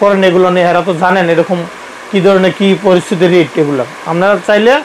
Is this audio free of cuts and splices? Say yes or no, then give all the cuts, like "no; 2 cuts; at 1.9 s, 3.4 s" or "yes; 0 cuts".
yes; 0 cuts